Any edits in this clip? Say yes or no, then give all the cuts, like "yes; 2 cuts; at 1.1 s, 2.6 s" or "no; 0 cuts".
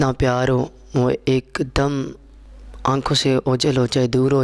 no; 0 cuts